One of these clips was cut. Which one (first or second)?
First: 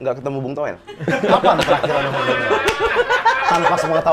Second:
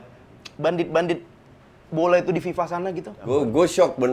second